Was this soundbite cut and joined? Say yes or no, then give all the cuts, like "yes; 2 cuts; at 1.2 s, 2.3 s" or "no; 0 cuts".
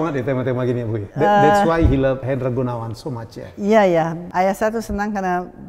yes; 3 cuts; at 1.0 s, 2.2 s, 4.2 s